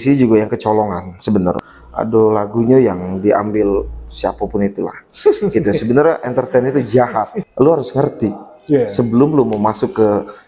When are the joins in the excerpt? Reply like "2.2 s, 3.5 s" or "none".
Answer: 1.7 s, 7.4 s